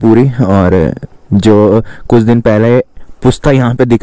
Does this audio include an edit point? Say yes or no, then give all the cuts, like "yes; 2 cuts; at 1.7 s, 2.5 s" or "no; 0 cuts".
no; 0 cuts